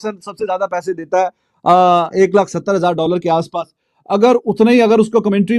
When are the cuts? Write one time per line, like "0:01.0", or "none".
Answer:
none

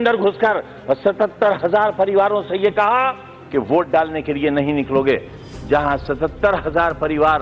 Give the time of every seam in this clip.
none

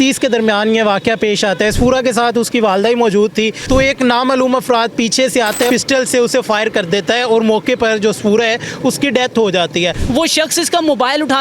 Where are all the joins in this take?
0:03.6
0:05.7
0:10.0

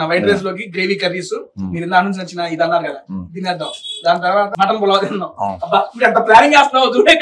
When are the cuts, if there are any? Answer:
0:04.5

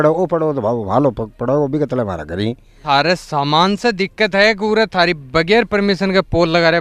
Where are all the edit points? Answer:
0:02.7

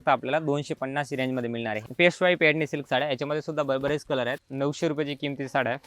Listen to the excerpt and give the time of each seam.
0:01.8
0:04.4

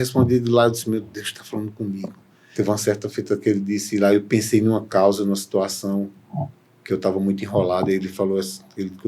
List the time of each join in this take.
0:02.5

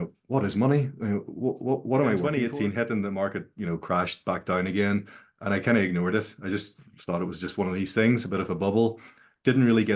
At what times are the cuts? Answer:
0:02.3

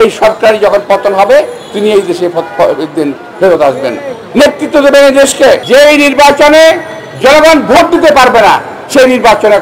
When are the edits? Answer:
0:05.6

